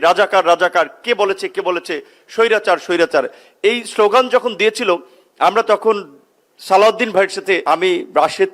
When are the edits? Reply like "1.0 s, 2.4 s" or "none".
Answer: 7.6 s